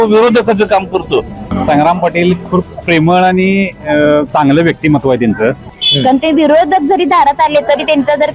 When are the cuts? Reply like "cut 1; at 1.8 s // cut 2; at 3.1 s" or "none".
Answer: cut 1; at 1.5 s // cut 2; at 5.7 s